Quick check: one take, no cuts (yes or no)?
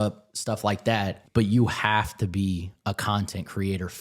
no